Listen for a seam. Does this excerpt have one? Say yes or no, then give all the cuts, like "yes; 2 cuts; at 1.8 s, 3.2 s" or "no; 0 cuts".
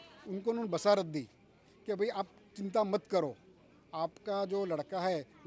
no; 0 cuts